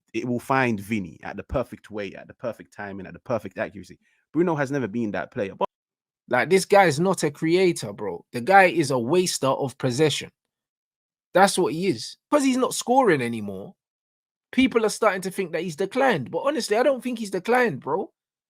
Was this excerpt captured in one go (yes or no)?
no